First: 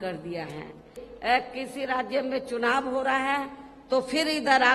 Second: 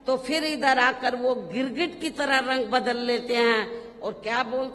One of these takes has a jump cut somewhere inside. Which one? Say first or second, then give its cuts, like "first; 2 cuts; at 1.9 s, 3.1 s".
first; 1 cut; at 1.1 s